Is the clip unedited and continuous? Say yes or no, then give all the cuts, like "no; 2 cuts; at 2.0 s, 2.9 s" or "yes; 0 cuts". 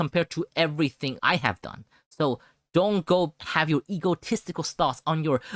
no; 2 cuts; at 1.2 s, 3.4 s